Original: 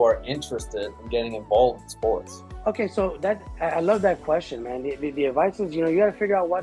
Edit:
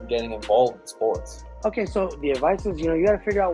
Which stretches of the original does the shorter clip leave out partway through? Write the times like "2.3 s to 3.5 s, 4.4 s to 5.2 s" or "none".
3.2 s to 5.1 s